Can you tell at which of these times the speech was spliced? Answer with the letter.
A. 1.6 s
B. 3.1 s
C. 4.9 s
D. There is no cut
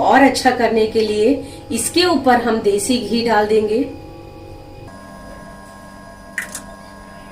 D